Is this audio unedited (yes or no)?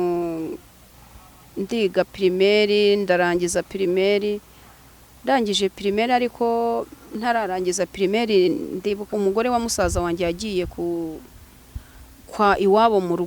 no